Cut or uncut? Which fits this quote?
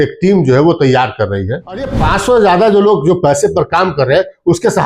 cut